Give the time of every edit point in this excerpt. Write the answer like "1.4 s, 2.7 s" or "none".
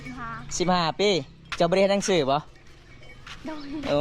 1.4 s